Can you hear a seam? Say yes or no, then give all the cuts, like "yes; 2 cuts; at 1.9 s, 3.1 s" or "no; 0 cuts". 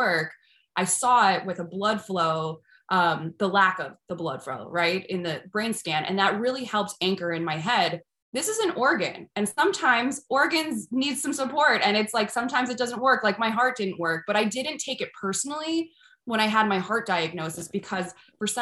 no; 0 cuts